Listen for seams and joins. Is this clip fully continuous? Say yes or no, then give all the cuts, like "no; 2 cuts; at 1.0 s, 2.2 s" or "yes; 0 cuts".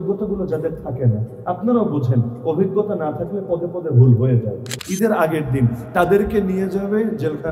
no; 1 cut; at 4.7 s